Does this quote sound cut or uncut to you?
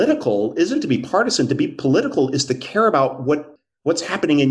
cut